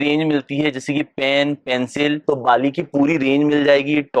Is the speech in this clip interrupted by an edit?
yes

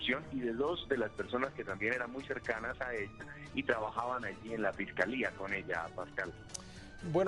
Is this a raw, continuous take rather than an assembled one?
no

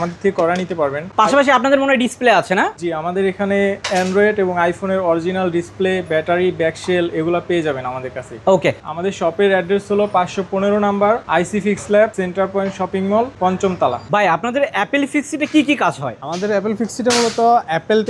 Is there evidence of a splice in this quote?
no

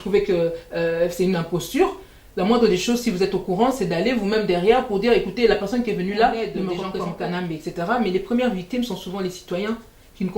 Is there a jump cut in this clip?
yes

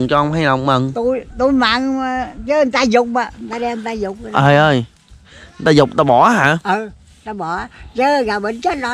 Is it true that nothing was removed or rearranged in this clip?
yes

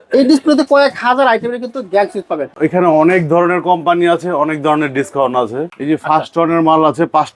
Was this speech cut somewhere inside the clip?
yes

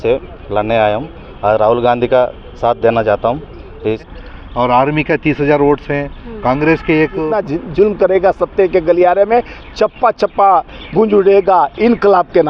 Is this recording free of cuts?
no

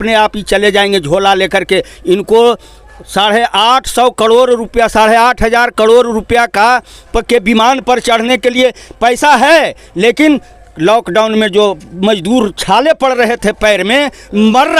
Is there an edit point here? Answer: no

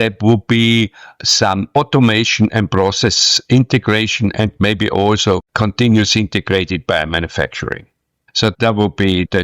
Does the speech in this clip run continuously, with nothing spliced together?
no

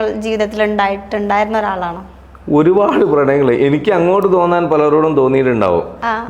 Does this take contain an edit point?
no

